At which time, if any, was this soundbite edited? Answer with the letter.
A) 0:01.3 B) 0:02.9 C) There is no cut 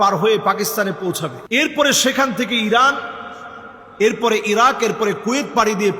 A